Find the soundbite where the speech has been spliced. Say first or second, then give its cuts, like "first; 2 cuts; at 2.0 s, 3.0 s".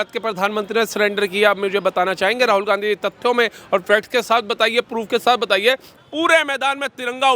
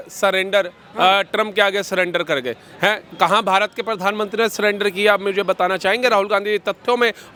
first; 1 cut; at 6.0 s